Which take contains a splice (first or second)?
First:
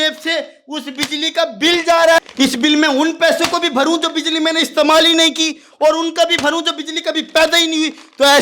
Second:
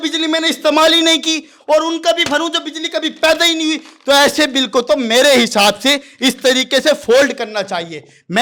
first